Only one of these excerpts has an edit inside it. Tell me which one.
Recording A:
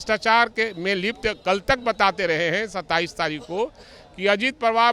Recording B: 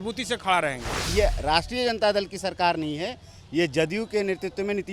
B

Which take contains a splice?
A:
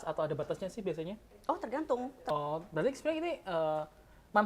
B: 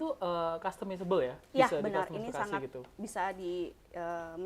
A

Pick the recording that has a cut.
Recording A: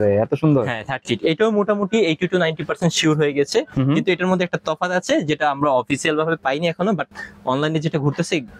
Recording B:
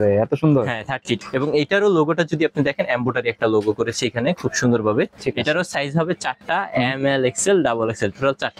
B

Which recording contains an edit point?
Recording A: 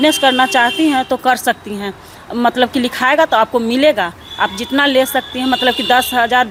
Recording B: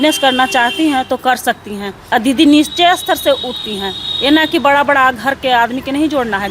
B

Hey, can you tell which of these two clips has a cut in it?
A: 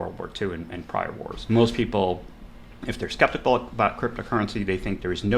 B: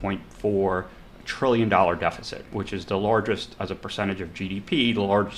A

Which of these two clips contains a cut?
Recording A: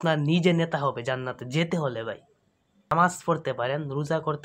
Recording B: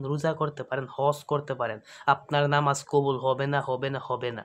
A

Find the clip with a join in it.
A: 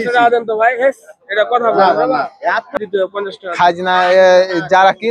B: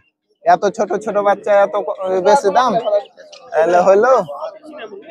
A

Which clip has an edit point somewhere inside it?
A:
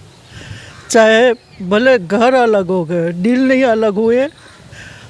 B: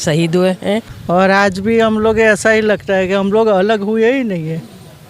B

